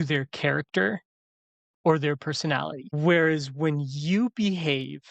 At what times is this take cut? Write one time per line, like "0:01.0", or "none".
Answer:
0:02.9